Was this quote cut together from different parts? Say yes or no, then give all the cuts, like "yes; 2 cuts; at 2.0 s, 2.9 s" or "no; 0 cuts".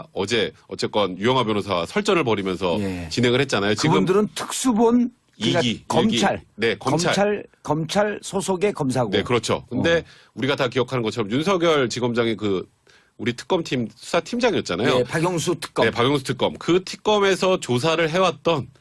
yes; 1 cut; at 7.9 s